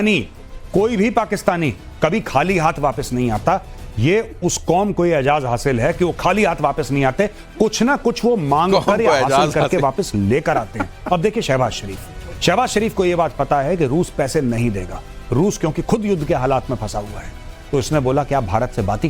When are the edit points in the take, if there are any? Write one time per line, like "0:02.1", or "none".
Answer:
0:10.9